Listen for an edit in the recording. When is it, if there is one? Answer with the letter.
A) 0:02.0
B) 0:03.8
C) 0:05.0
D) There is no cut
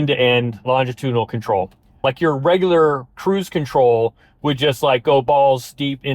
A